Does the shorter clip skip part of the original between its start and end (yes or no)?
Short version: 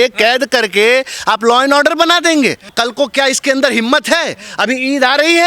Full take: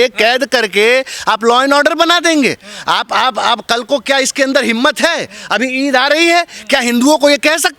yes